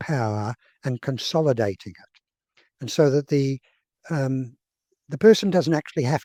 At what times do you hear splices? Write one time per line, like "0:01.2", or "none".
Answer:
none